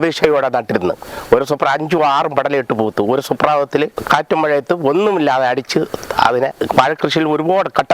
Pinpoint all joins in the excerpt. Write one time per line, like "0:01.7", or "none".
0:04.0
0:06.5

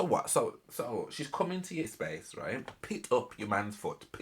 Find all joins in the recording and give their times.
0:02.2

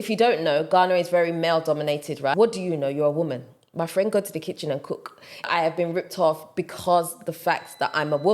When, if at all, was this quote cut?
0:02.3
0:05.5

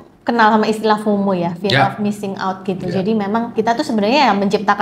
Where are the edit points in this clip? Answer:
0:03.5

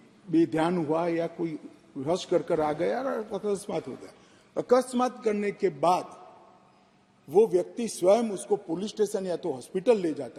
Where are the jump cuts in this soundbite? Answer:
none

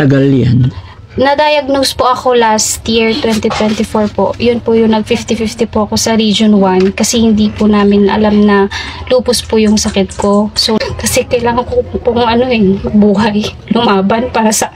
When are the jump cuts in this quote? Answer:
0:10.8

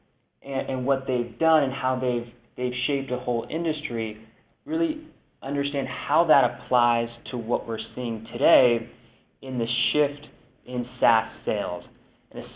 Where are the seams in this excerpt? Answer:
none

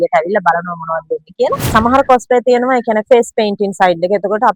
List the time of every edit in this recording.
0:01.4

